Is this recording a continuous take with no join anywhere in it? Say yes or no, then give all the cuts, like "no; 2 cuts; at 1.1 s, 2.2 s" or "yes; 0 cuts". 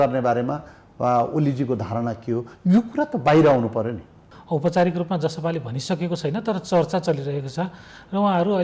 no; 1 cut; at 4.3 s